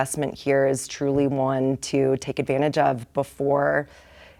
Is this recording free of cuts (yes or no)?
yes